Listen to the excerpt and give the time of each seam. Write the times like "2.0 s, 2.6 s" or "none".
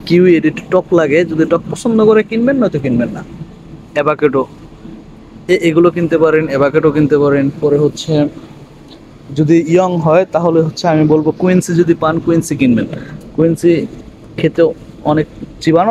none